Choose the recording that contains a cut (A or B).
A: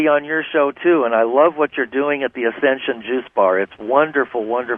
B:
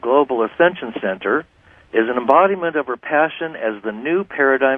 B